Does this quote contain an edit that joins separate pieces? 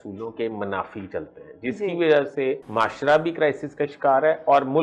yes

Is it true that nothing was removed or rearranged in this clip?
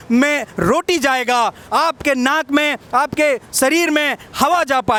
yes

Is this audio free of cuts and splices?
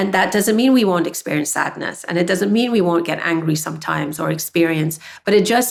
yes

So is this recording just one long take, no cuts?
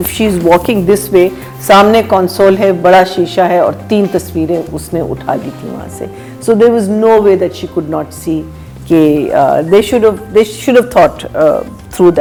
yes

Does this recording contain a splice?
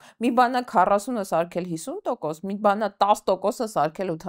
no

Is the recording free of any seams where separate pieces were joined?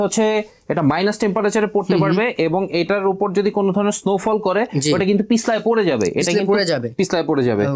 yes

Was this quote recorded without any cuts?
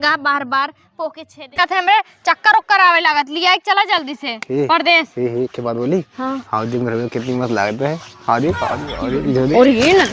no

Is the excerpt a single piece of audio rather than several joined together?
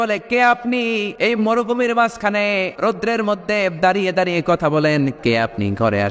no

